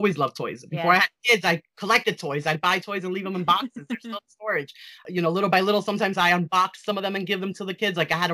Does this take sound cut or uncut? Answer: uncut